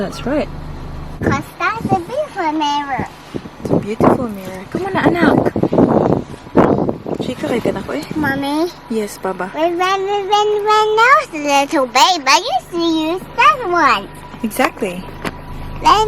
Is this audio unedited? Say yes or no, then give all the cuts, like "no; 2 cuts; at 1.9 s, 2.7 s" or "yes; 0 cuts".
no; 1 cut; at 1.2 s